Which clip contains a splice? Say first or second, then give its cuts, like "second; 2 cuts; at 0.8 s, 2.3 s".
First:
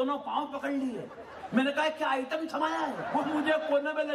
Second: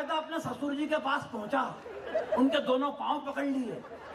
first; 1 cut; at 3.0 s